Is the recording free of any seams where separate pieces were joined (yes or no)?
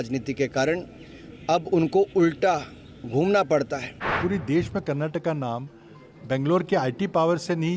no